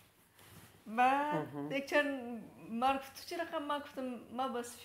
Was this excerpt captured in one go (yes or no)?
yes